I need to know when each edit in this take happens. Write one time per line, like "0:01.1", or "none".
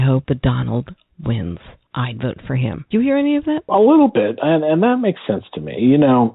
0:01.7
0:02.8
0:03.7